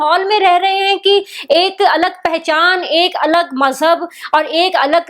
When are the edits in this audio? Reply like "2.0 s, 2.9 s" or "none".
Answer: none